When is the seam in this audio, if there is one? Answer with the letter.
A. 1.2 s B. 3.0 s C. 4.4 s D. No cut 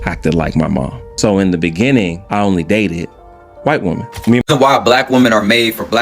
C